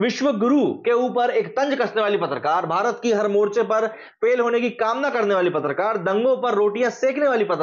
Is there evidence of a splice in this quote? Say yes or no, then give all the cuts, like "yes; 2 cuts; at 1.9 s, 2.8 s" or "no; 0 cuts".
no; 0 cuts